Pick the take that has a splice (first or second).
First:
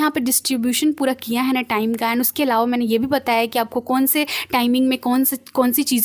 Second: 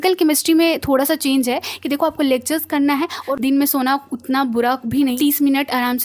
second